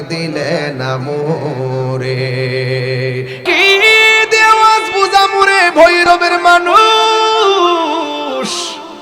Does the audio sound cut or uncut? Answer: cut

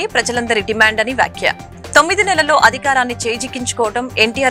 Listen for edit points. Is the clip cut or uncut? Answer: uncut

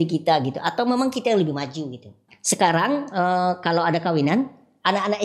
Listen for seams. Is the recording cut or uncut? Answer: cut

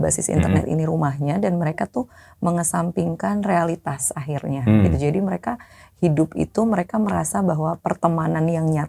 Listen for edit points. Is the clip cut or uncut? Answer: uncut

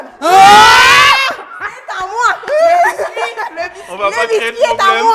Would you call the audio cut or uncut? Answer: uncut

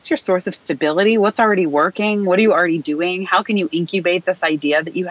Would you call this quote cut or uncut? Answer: uncut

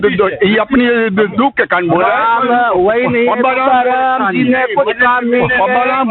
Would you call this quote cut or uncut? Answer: uncut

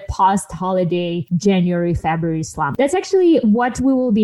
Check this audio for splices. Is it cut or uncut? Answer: cut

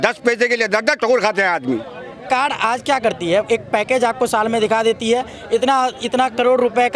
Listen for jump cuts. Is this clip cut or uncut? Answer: cut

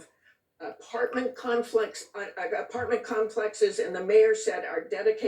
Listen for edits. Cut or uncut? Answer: uncut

